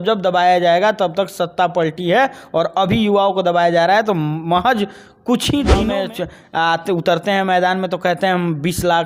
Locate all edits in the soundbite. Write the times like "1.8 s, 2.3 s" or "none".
5.9 s